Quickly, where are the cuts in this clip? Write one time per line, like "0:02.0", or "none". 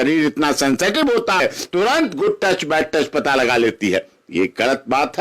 0:01.4